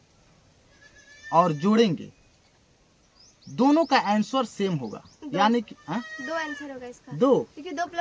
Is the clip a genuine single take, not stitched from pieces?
yes; 0 cuts

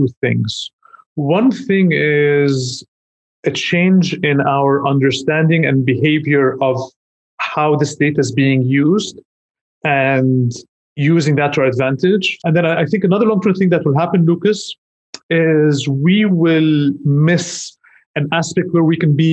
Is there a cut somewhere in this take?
yes; 1 cut; at 12.3 s

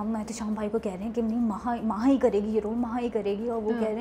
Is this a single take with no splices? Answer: yes; 0 cuts

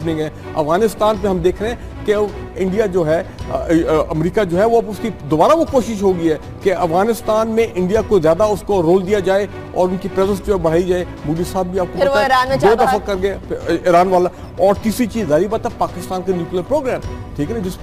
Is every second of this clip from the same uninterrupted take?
yes; 0 cuts

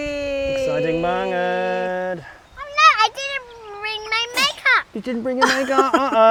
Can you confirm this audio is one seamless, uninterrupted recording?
yes; 0 cuts

